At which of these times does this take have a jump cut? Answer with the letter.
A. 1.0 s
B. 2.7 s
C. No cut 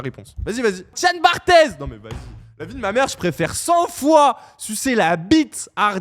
A